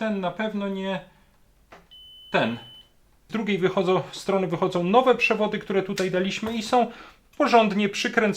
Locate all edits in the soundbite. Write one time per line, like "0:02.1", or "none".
0:03.3